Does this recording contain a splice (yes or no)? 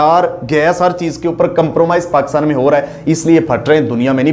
no